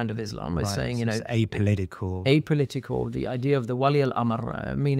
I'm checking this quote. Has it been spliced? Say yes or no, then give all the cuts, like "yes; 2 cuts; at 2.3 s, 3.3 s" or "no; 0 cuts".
no; 0 cuts